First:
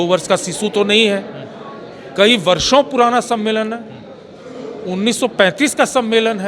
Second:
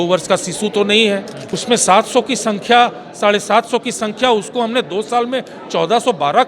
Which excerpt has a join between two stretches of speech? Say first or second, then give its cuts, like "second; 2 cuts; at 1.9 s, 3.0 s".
second; 1 cut; at 1.4 s